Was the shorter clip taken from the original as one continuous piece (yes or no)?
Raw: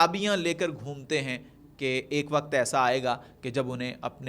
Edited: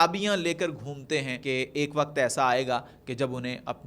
no